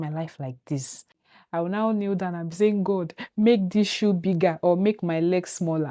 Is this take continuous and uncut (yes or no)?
no